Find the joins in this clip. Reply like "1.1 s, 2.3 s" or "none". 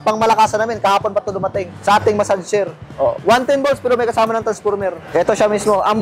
1.7 s, 2.8 s